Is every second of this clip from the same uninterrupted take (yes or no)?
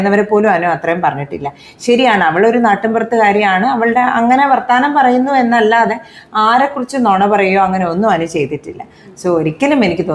yes